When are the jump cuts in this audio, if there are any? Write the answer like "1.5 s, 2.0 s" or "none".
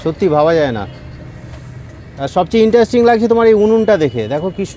none